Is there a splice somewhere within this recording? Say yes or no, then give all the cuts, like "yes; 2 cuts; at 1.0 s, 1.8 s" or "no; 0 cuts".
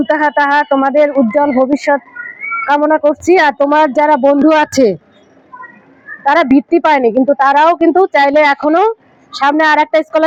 no; 0 cuts